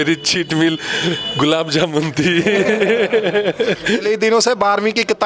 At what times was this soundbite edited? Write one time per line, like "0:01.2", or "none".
0:04.0